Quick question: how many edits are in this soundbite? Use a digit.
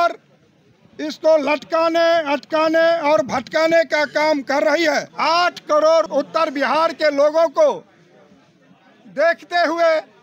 2